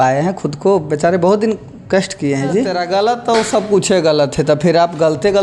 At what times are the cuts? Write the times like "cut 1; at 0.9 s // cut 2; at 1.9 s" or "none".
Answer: cut 1; at 2.8 s